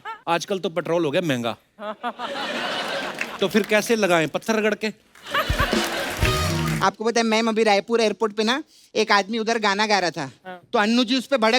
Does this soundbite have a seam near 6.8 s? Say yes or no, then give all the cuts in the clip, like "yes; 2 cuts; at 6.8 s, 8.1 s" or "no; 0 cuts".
yes; 1 cut; at 6.8 s